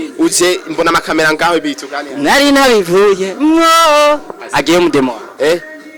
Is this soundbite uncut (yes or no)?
no